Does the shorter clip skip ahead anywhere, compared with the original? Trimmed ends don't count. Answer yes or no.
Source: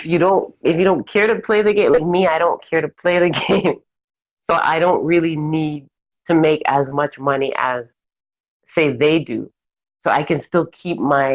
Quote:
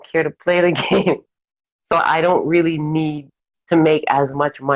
no